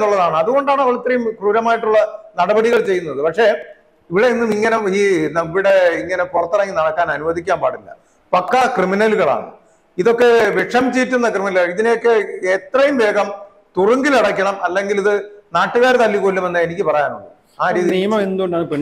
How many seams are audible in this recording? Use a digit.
0